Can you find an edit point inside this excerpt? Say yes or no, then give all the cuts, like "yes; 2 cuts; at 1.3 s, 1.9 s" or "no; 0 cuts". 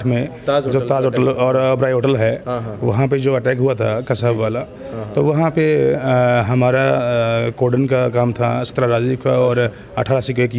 no; 0 cuts